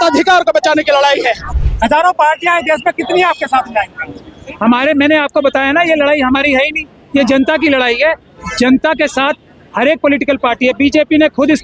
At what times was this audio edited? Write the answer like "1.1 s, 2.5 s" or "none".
1.6 s